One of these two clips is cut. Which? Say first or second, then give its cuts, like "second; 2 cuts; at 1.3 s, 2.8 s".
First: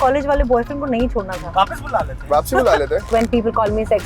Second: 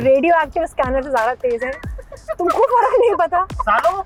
first; 2 cuts; at 1.4 s, 3.1 s